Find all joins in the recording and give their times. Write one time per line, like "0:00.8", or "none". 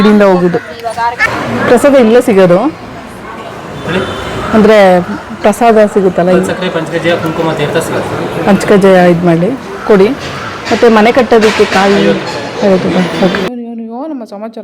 0:01.2
0:13.5